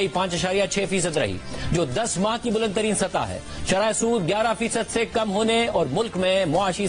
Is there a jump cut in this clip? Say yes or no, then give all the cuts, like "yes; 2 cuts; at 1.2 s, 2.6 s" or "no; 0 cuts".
no; 0 cuts